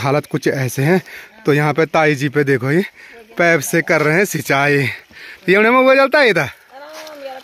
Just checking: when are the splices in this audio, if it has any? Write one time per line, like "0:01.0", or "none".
none